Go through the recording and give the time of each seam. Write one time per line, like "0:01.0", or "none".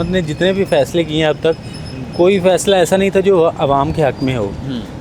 none